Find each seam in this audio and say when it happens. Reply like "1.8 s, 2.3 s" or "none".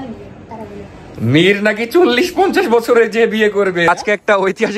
3.8 s

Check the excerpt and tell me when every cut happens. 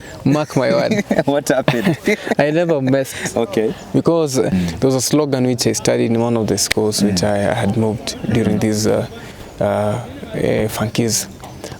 4.5 s

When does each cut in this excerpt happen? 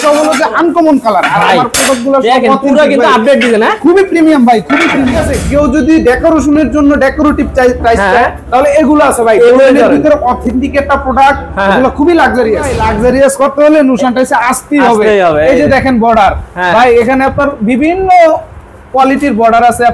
5.3 s, 12.8 s

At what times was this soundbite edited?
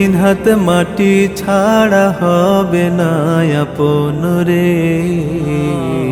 none

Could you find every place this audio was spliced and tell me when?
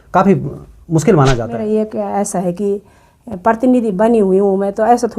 1.5 s

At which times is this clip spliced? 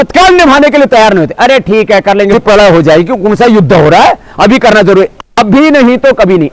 2.3 s

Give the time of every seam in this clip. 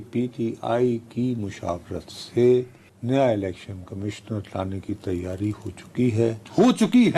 none

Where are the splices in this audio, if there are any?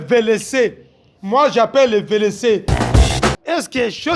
3.1 s

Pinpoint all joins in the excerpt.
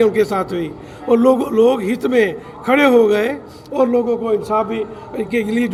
none

